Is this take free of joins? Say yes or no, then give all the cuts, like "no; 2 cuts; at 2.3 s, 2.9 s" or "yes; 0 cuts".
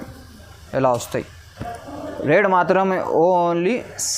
yes; 0 cuts